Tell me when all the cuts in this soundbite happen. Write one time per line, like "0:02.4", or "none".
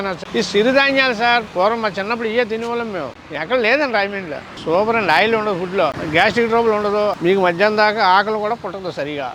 0:01.5
0:03.2
0:04.5
0:06.0